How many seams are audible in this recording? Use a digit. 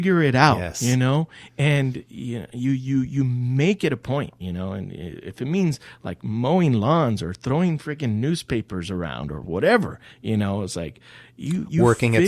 0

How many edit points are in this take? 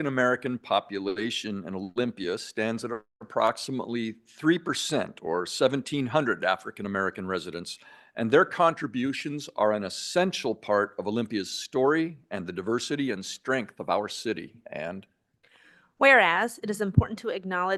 0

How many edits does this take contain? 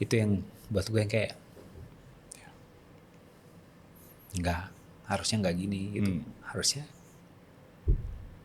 0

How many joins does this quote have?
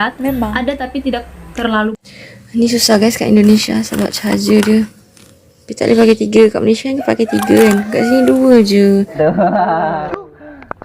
2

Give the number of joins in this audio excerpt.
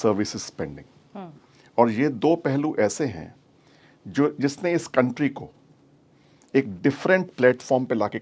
0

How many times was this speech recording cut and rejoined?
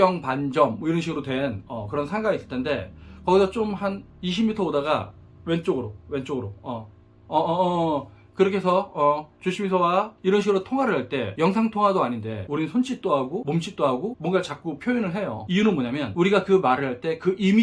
5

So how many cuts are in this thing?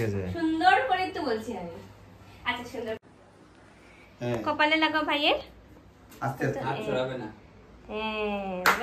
1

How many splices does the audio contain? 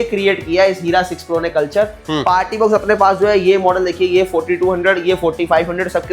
1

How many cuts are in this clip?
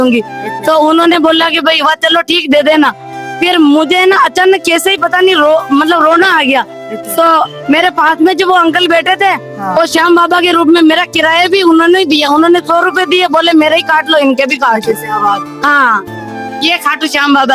0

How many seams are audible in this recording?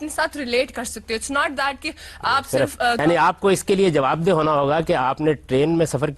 1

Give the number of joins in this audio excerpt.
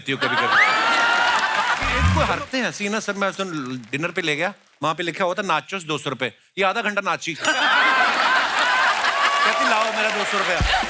1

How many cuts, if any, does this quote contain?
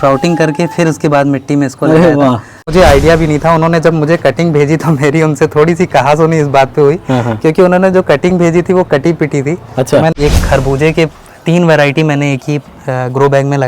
2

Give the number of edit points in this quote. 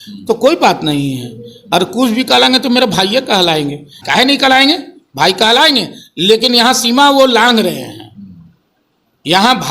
1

